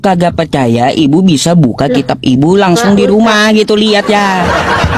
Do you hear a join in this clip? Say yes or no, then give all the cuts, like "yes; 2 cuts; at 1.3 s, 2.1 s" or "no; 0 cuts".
no; 0 cuts